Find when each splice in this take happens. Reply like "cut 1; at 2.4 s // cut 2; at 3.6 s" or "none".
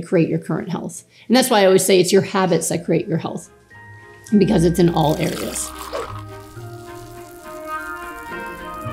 cut 1; at 5.6 s